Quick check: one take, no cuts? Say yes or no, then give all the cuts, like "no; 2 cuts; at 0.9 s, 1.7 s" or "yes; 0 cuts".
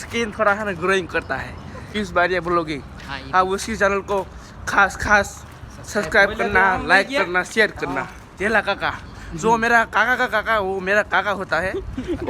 no; 2 cuts; at 1.8 s, 8.2 s